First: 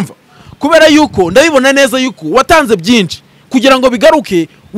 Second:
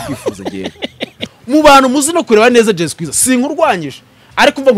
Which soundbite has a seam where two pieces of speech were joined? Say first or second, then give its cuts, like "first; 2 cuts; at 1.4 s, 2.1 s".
second; 1 cut; at 1.1 s